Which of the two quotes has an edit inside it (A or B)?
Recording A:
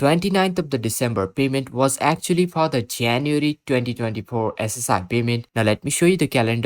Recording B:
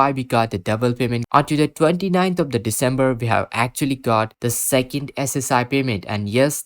B